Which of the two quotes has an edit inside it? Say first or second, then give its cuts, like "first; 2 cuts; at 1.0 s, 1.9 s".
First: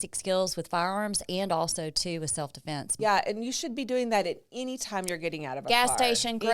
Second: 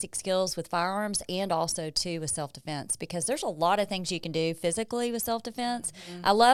first; 1 cut; at 2.9 s